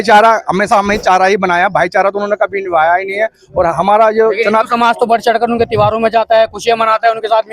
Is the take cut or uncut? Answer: uncut